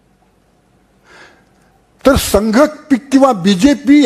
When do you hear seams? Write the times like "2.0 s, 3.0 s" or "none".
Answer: none